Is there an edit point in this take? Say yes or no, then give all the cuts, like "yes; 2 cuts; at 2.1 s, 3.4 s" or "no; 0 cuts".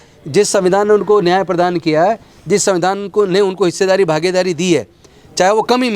no; 0 cuts